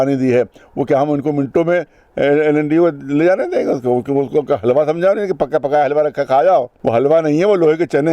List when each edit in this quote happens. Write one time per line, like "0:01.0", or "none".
0:06.8

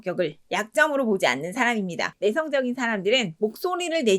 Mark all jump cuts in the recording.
0:02.1

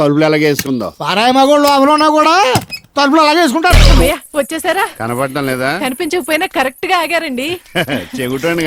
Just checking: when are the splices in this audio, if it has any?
0:03.9

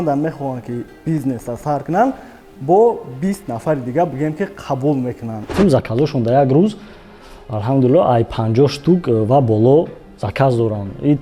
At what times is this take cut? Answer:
0:05.5

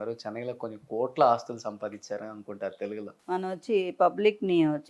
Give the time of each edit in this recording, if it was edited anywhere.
0:03.1

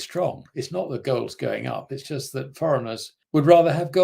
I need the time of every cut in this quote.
0:03.1

